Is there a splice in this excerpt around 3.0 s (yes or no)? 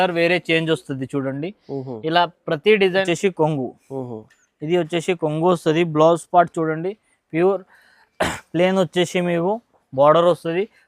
yes